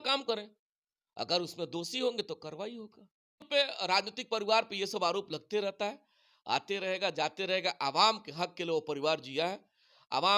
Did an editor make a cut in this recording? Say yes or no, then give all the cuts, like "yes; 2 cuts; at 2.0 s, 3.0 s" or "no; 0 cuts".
yes; 1 cut; at 3.4 s